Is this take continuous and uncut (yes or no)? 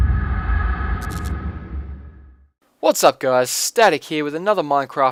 yes